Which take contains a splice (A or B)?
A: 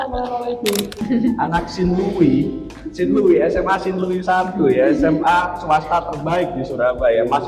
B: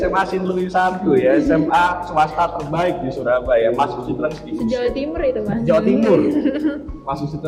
A